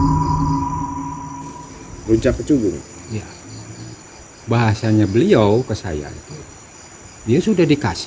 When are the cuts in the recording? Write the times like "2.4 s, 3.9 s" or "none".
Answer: 1.2 s, 3.9 s